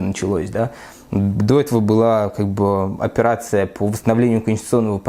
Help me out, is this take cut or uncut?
uncut